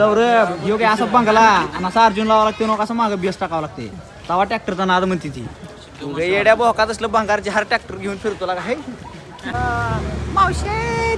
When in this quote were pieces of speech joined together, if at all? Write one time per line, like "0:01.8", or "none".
0:09.5